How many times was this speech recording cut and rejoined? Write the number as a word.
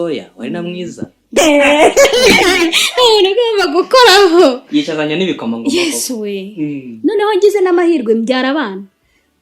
one